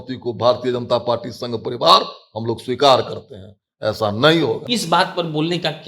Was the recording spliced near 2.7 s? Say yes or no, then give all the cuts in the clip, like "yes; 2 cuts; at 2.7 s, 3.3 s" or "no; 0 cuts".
no; 1 cut; at 4.6 s